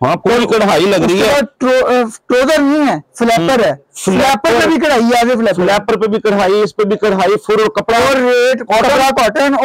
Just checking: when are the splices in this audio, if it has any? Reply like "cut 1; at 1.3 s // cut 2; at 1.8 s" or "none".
none